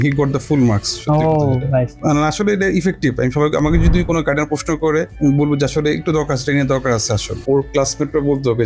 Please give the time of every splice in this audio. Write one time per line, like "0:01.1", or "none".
0:01.9
0:07.4